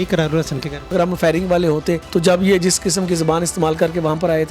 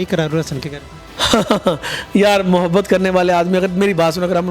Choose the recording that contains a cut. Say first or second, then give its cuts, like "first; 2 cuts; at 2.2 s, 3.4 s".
first; 2 cuts; at 0.9 s, 2.0 s